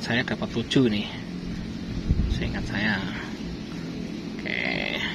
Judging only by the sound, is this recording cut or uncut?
uncut